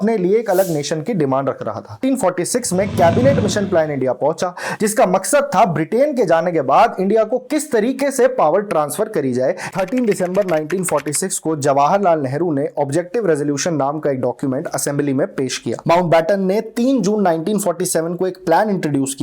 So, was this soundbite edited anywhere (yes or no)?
yes